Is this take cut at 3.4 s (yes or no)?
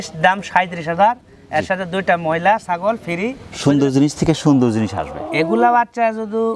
yes